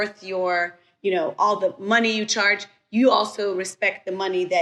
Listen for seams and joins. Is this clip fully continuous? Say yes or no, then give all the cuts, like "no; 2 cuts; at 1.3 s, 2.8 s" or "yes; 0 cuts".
yes; 0 cuts